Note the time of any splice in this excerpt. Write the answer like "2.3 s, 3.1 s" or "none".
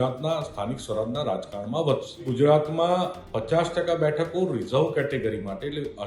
2.2 s

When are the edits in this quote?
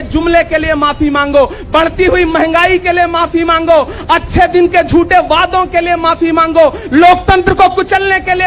none

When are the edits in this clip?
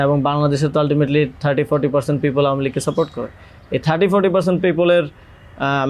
none

